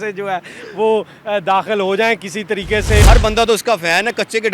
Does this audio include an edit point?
yes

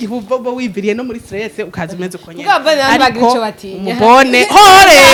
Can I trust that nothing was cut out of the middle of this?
yes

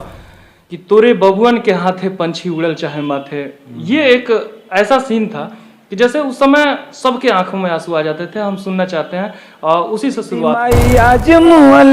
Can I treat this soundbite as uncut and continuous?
no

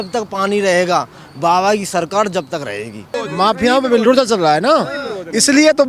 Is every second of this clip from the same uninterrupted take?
no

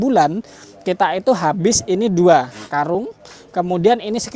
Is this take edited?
no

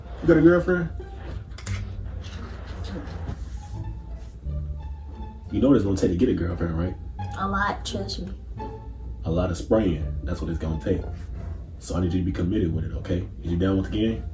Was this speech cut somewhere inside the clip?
yes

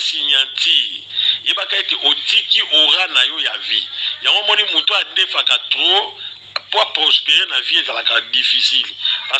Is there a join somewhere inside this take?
no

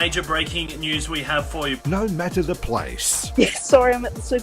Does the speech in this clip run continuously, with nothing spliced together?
no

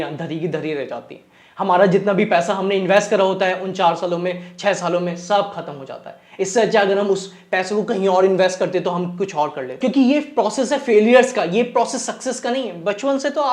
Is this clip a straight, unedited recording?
no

